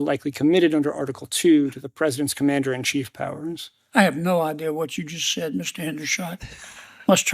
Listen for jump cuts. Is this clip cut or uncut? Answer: uncut